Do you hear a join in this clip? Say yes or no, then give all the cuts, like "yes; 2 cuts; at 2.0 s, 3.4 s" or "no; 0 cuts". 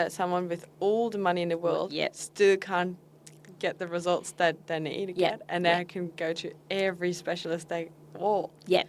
no; 0 cuts